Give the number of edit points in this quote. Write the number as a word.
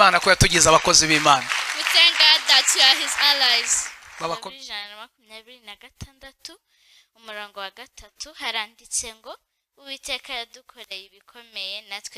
one